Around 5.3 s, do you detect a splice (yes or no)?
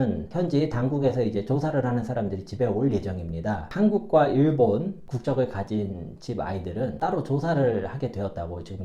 no